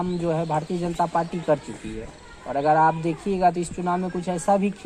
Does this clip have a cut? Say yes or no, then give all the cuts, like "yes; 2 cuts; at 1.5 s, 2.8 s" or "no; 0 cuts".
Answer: no; 0 cuts